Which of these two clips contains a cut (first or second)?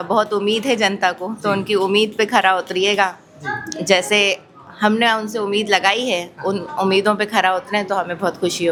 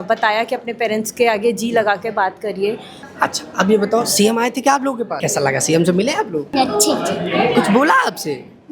second